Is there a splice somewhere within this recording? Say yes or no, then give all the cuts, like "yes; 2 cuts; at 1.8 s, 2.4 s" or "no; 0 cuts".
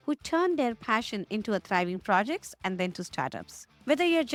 no; 0 cuts